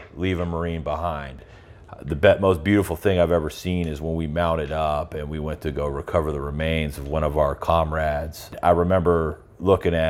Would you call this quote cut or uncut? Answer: cut